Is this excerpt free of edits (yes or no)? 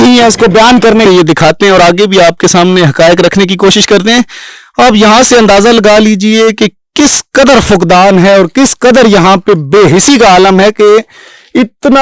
no